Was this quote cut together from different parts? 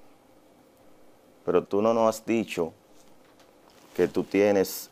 no; 0 cuts

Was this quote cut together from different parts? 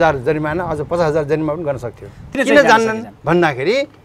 yes; 1 cut; at 2.2 s

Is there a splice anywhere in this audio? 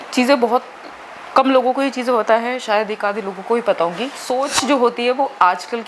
yes; 1 cut; at 4.2 s

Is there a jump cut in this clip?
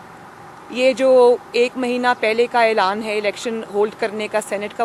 no; 0 cuts

